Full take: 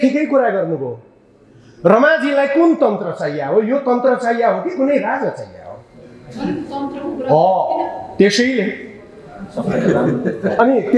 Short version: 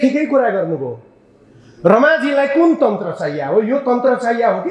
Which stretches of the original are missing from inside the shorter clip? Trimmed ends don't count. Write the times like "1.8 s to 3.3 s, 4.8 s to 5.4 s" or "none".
none